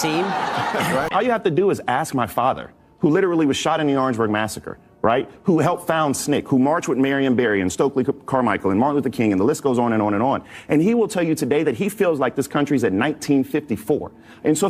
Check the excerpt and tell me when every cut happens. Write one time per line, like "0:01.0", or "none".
0:01.1

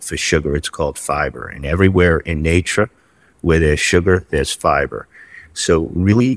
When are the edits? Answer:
none

